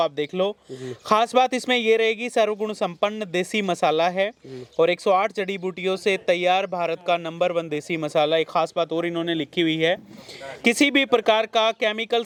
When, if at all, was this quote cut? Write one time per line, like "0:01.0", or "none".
none